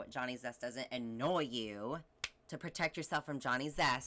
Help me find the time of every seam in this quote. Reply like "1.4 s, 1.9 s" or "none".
2.1 s